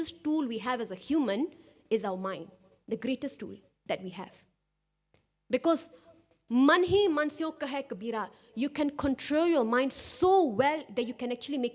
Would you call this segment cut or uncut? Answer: uncut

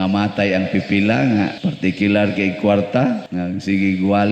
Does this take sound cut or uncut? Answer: cut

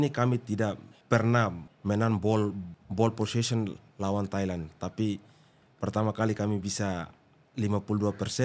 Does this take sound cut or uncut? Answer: cut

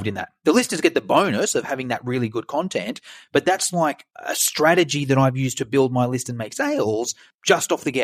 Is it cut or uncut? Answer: uncut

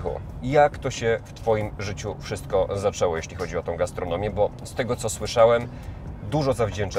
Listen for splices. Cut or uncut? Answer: uncut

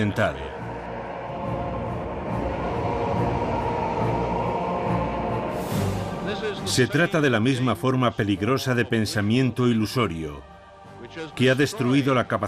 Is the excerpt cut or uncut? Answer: cut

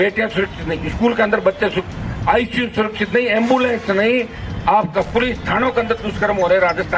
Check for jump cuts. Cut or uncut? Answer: uncut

